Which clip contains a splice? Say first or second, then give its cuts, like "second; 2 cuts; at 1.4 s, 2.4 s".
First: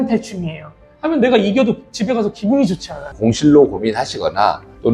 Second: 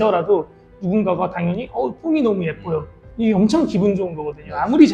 first; 1 cut; at 3.1 s